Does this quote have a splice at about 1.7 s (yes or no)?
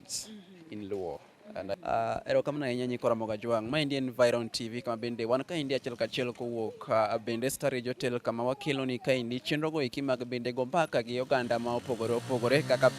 yes